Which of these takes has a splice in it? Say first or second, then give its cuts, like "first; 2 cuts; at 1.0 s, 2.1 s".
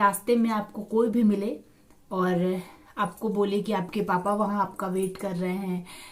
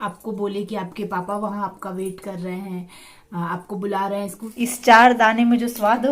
second; 1 cut; at 4.3 s